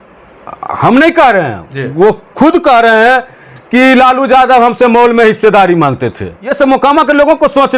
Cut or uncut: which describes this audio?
cut